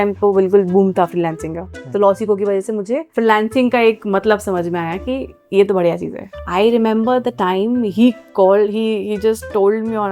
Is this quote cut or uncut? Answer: cut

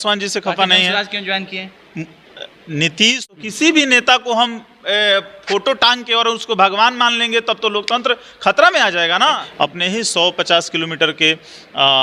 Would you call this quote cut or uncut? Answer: cut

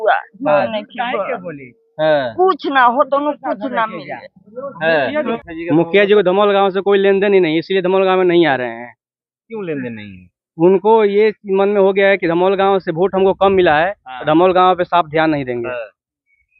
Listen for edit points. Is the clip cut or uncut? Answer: cut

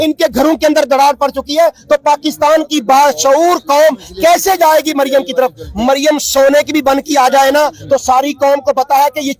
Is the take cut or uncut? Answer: uncut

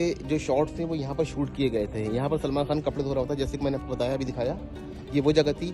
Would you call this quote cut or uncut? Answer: uncut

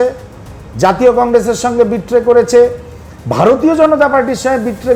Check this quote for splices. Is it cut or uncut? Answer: uncut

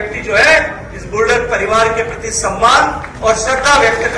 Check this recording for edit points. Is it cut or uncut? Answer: uncut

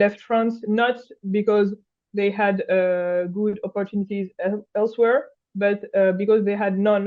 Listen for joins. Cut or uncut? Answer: uncut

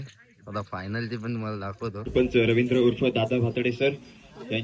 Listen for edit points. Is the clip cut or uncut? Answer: cut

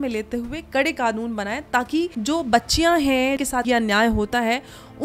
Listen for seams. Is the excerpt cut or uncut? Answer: cut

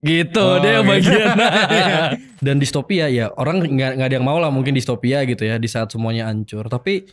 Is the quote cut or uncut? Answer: cut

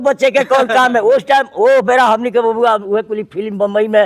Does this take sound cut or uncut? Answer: uncut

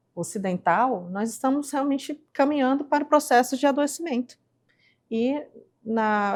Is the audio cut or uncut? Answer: uncut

